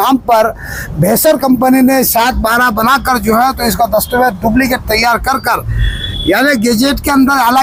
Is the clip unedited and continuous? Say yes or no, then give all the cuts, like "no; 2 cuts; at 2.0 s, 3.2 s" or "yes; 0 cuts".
yes; 0 cuts